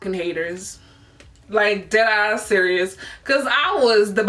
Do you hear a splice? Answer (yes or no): no